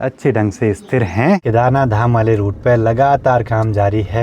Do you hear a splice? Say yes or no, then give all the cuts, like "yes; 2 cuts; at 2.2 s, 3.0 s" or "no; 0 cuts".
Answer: yes; 1 cut; at 1.4 s